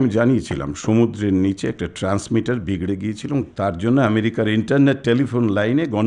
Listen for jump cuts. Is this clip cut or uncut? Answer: uncut